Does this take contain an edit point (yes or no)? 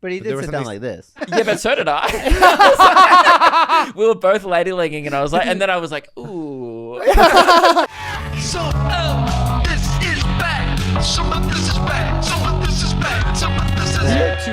yes